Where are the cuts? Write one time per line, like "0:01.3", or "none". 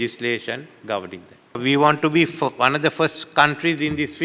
none